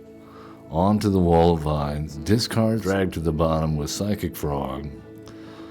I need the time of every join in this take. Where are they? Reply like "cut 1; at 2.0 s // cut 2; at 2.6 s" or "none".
cut 1; at 2.1 s // cut 2; at 2.8 s